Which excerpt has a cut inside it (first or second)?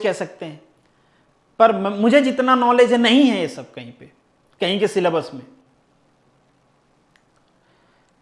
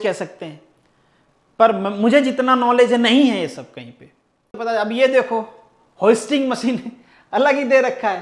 second